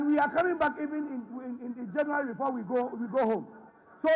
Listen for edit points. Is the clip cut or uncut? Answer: uncut